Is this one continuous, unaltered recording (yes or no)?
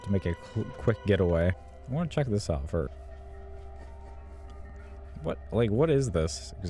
no